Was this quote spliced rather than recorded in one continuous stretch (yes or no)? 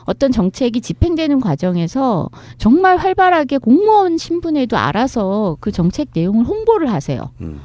no